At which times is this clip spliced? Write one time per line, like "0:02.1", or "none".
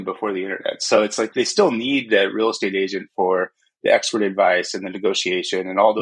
0:01.3